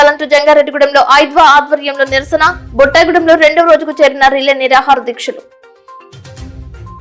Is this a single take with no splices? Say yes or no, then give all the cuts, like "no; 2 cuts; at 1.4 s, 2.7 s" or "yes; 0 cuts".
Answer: yes; 0 cuts